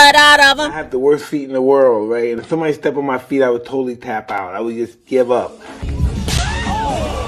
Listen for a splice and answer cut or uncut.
uncut